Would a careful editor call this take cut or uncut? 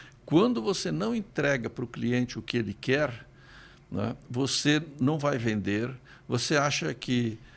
uncut